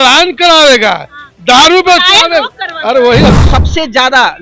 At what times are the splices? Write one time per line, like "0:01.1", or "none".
0:03.4

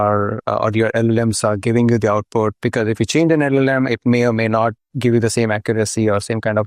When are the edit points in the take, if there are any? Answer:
none

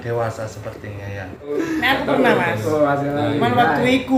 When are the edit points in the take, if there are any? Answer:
0:01.3

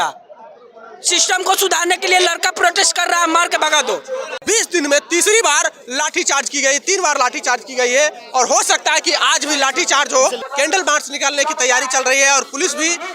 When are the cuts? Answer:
0:04.3
0:10.4

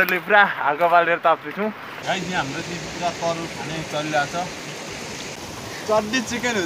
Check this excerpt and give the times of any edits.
0:01.9
0:05.4

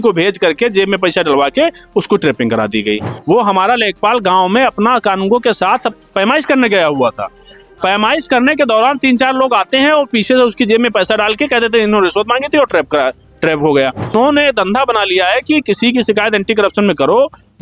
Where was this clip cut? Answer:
0:03.1
0:14.1

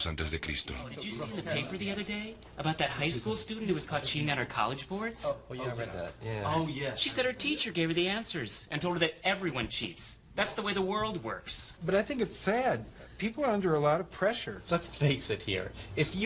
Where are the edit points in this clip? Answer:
0:02.9

